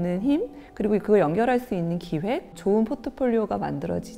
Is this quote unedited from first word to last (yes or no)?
no